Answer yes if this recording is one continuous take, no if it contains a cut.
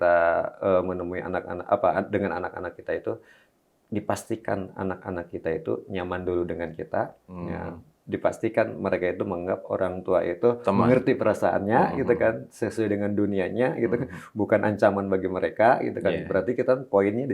yes